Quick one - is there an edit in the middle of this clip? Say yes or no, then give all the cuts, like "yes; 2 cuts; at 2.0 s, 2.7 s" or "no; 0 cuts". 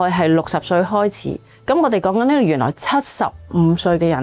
no; 0 cuts